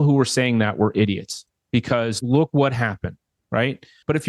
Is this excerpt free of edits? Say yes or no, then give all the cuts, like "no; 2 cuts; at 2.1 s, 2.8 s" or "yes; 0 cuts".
yes; 0 cuts